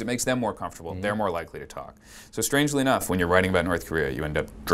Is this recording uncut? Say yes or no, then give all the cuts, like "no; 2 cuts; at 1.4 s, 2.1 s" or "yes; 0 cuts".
yes; 0 cuts